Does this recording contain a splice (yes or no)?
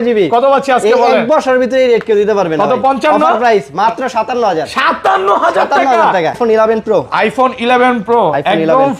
yes